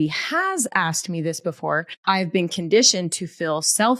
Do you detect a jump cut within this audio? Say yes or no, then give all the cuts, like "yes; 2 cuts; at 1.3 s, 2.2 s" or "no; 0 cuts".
yes; 1 cut; at 1.9 s